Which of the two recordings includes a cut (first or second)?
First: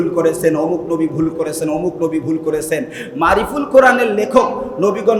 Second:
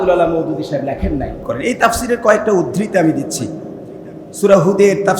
second